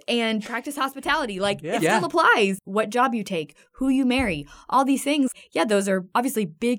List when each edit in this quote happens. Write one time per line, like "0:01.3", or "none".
0:02.6
0:05.8